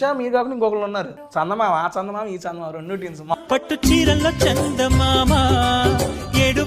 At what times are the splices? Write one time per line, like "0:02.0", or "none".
0:01.2
0:03.3